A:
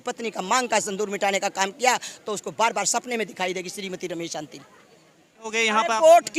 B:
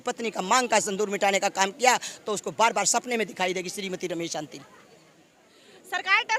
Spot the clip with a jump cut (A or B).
A